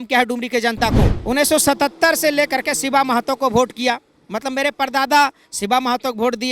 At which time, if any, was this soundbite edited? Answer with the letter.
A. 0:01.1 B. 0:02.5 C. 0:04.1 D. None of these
A